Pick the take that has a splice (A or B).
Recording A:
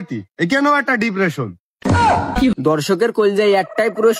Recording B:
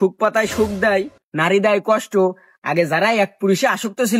A